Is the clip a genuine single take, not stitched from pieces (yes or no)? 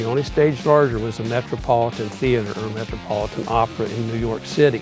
yes